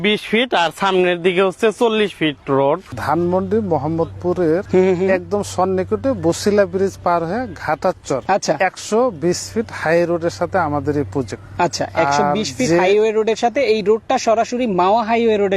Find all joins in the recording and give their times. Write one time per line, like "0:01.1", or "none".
0:02.9
0:04.6
0:08.2
0:11.4